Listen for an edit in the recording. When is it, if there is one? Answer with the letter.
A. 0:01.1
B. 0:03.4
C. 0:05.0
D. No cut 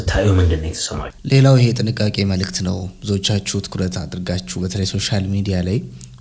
A